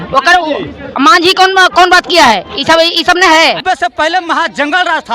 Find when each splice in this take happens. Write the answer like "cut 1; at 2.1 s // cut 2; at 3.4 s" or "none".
cut 1; at 3.6 s